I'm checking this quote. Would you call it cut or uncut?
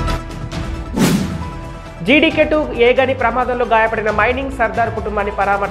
uncut